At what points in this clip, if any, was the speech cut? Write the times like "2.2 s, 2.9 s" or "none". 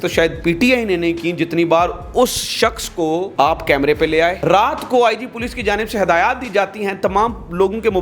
3.3 s, 4.4 s